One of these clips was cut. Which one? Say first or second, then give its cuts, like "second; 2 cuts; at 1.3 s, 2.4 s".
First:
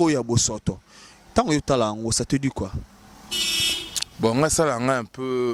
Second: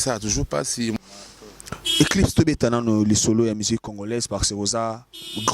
second; 1 cut; at 1.0 s